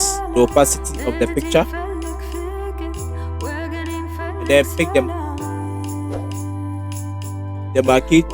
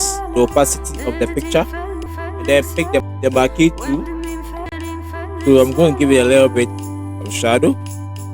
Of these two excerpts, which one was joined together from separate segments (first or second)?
second